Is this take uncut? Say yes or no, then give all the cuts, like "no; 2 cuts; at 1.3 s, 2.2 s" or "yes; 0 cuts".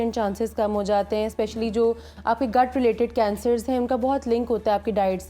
yes; 0 cuts